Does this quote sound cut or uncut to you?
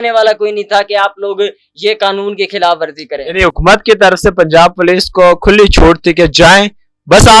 uncut